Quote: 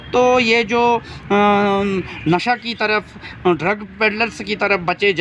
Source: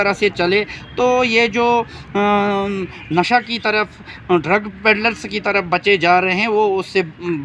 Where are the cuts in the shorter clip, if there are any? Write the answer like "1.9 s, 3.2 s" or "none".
none